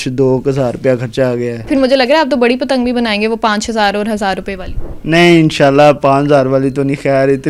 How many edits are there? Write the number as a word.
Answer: one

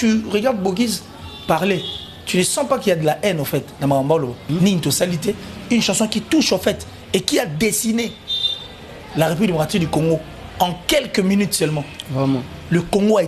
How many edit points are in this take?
one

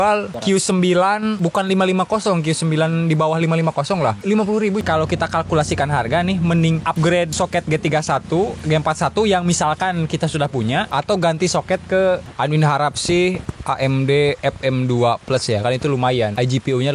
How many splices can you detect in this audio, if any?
two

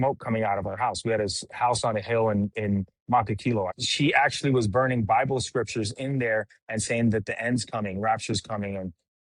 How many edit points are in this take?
one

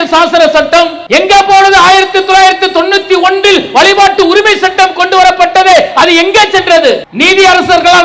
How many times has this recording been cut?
two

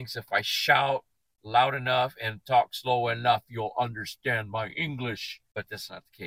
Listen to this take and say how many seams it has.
one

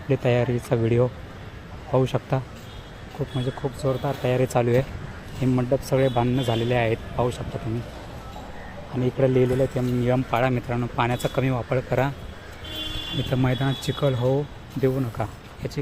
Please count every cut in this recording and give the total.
zero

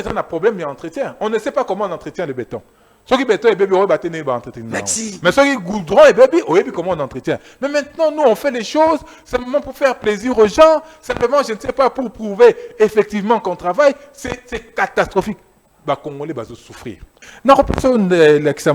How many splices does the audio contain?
one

